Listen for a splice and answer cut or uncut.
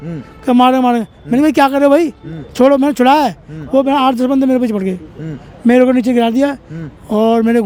uncut